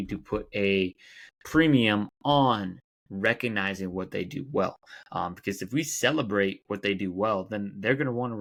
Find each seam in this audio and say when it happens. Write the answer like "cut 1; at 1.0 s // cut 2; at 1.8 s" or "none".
none